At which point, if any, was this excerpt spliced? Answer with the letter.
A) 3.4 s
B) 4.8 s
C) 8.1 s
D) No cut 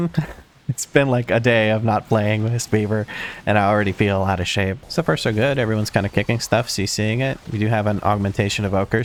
D